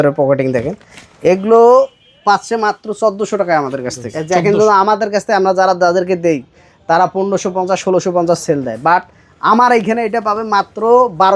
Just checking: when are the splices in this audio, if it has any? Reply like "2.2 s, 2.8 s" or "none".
4.1 s